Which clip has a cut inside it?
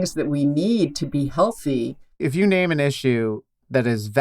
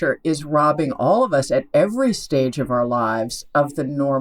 first; 1 cut; at 2.1 s

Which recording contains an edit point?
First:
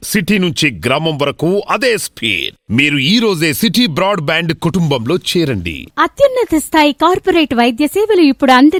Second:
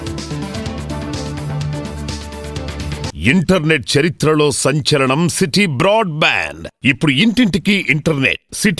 second; 1 cut; at 3.2 s

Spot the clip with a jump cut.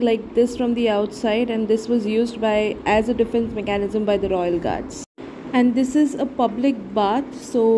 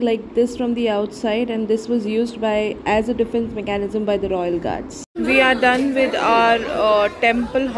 second; 1 cut; at 5.4 s

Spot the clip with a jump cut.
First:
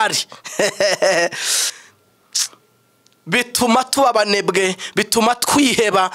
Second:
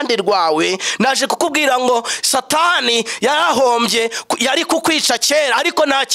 first; 1 cut; at 1.6 s

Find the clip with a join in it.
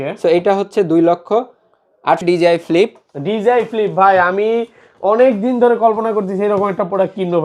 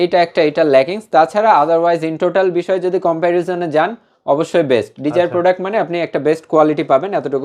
first; 1 cut; at 2.2 s

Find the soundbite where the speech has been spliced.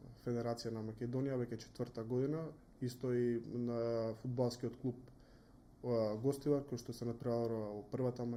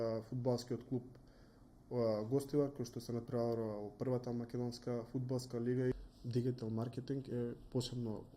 second; 1 cut; at 5.9 s

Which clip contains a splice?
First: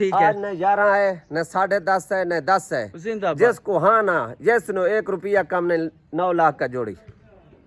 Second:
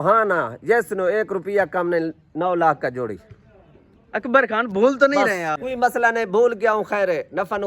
second; 1 cut; at 5.6 s

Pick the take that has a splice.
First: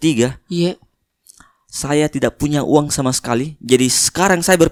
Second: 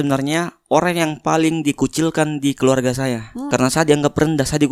second; 1 cut; at 3.4 s

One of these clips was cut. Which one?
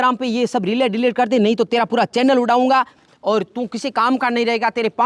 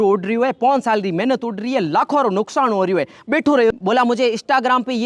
second; 1 cut; at 3.7 s

